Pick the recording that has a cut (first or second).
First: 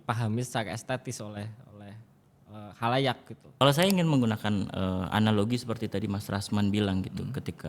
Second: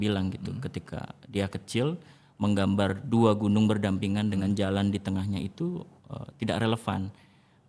first